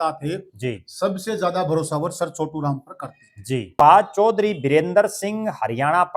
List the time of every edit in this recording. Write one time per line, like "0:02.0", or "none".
0:03.7